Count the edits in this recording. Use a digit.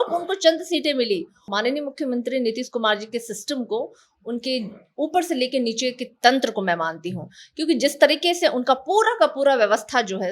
1